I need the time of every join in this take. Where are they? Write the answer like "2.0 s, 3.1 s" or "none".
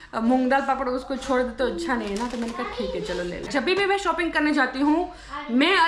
3.5 s

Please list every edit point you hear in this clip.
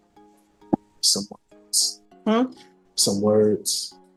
none

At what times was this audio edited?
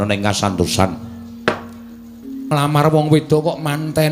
2.5 s

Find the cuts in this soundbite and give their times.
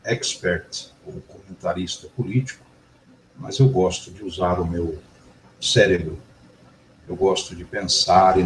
1.6 s

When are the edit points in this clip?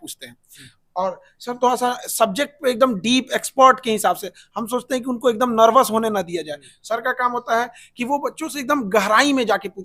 none

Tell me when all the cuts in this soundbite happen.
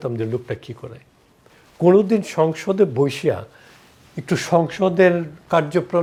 none

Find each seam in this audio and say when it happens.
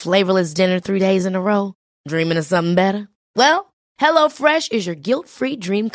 none

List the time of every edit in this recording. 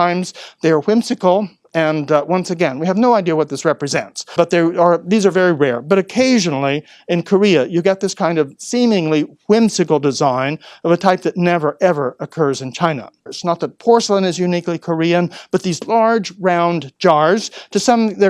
4.3 s, 13.3 s

